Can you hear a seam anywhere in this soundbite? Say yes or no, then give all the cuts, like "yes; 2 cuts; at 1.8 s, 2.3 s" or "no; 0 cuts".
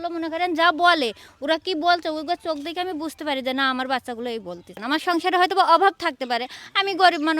yes; 1 cut; at 4.8 s